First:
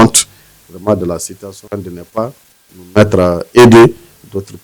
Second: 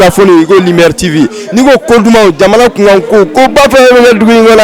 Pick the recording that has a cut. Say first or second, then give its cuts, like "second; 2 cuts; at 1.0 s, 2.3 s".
first; 1 cut; at 1.6 s